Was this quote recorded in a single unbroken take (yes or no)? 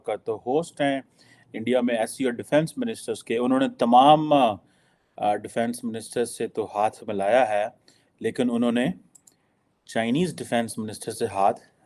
yes